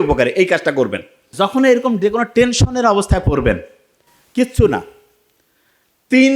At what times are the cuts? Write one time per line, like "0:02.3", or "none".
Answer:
0:01.3